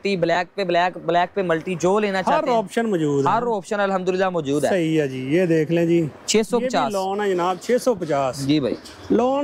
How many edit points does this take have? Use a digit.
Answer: 0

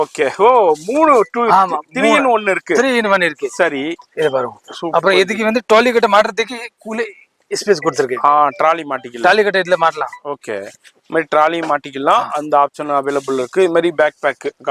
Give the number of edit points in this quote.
0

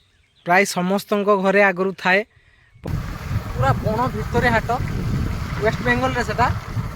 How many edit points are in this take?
1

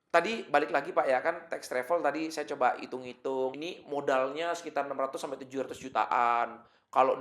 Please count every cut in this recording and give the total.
1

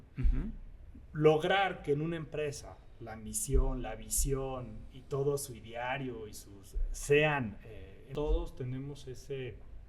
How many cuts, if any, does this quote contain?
1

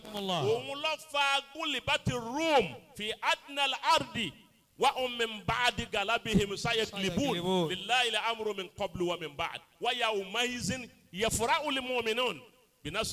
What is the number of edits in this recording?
0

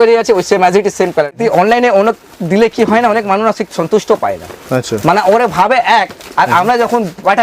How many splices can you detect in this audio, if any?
1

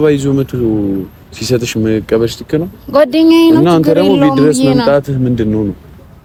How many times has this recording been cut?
0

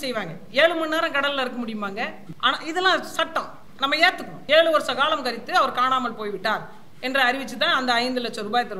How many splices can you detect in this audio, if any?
2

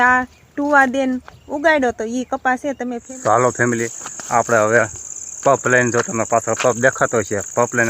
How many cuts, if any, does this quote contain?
1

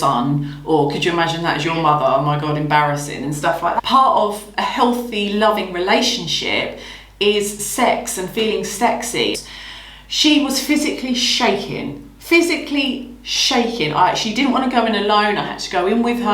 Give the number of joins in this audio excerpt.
2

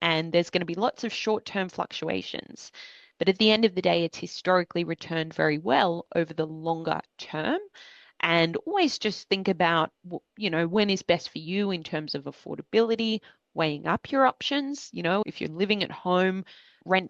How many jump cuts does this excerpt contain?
0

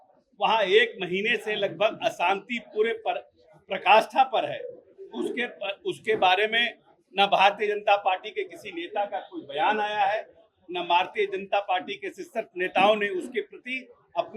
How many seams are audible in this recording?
0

